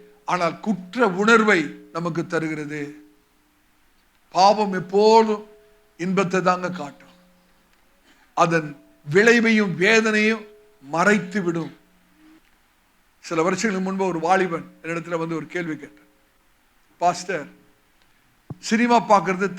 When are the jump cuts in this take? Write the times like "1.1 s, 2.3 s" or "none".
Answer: 12.5 s